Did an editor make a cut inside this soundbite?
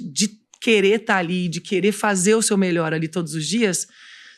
no; 0 cuts

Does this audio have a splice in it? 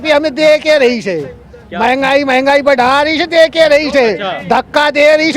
no; 0 cuts

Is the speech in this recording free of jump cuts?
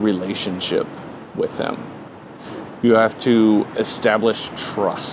yes; 0 cuts

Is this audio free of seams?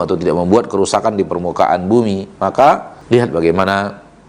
no; 1 cut; at 2.9 s

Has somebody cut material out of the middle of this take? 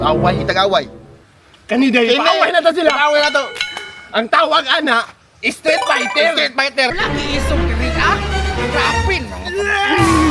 yes; 1 cut; at 6.9 s

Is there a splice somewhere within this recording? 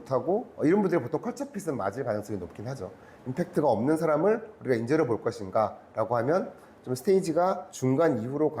yes; 1 cut; at 7.7 s

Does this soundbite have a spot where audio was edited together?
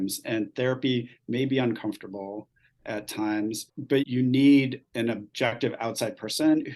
yes; 2 cuts; at 4.1 s, 5.6 s

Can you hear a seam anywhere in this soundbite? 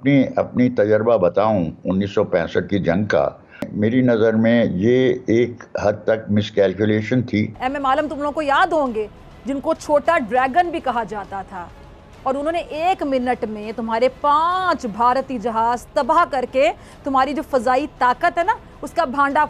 yes; 2 cuts; at 3.7 s, 7.6 s

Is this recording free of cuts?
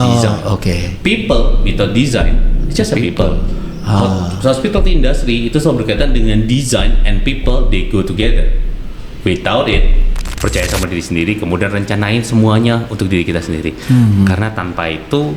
no; 1 cut; at 10.2 s

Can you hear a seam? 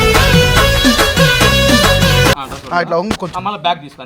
yes; 1 cut; at 2.4 s

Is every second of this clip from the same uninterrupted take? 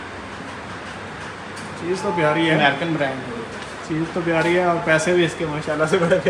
yes; 0 cuts

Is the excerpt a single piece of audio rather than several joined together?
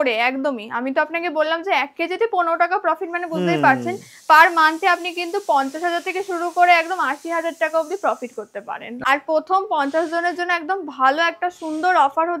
no; 1 cut; at 8.9 s

